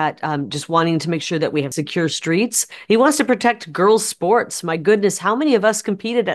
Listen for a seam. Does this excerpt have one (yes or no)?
yes